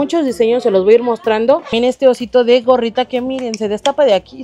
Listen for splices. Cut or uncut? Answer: cut